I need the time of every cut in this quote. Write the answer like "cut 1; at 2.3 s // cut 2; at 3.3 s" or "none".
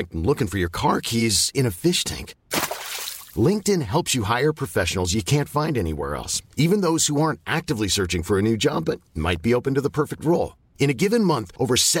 none